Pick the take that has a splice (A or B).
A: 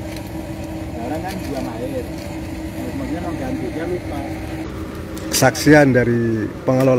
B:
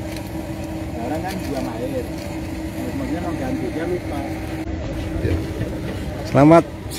A